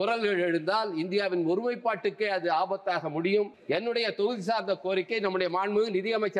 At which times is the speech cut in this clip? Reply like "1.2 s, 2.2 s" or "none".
3.6 s